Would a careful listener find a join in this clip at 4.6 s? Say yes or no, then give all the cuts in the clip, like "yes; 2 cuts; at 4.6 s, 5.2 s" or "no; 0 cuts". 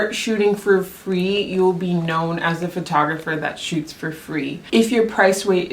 yes; 1 cut; at 4.6 s